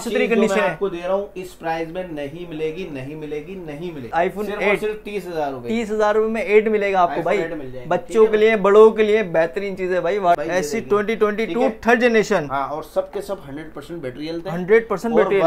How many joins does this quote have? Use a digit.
2